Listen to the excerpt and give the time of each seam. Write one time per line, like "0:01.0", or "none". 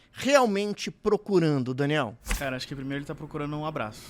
0:02.2